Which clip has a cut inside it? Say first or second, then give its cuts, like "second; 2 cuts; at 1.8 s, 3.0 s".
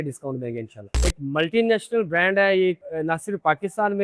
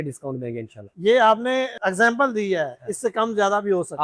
first; 1 cut; at 0.9 s